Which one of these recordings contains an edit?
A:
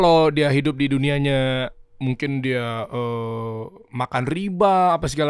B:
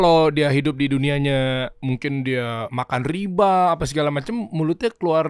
B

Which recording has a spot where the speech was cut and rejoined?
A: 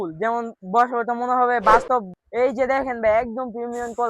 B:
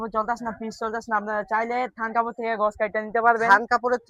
A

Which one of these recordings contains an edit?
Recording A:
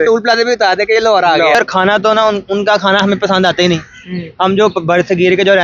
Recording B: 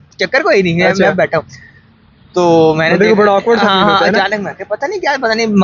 A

